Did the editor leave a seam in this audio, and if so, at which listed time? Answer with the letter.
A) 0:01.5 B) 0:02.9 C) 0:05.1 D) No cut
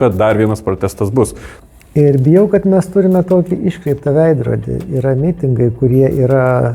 A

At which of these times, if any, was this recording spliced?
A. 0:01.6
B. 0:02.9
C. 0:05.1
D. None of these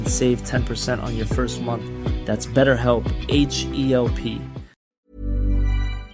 C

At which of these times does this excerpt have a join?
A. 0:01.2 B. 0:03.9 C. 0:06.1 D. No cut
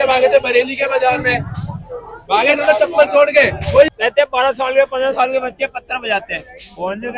B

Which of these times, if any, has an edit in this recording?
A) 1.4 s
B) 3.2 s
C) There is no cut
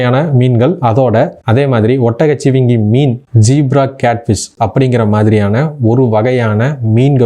A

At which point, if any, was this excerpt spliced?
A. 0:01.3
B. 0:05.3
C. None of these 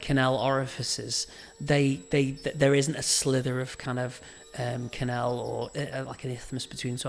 C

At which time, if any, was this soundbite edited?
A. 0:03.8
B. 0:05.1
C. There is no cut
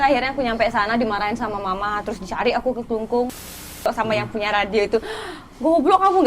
A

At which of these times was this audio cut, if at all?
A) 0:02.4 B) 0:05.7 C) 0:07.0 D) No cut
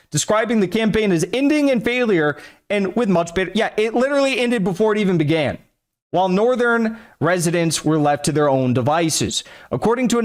D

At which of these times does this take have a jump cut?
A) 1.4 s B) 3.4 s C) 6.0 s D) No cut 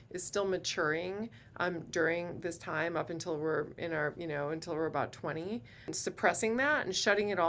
C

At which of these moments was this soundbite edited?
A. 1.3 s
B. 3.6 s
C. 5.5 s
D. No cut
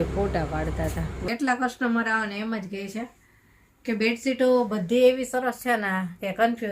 A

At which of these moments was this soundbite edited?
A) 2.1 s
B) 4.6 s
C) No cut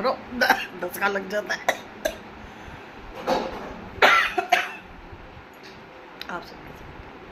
C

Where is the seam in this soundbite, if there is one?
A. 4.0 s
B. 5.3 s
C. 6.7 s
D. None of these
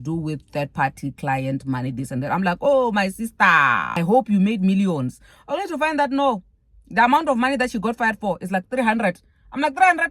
A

